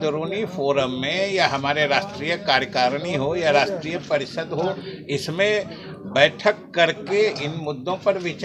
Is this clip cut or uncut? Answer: uncut